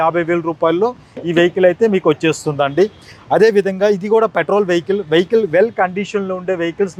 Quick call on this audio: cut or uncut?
uncut